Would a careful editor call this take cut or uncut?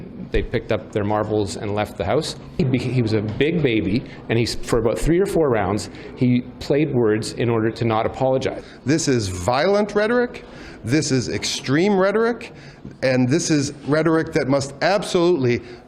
cut